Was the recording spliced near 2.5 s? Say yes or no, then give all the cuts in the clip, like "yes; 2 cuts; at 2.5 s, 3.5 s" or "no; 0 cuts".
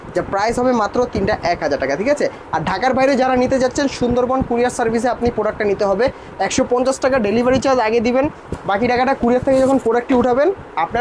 no; 0 cuts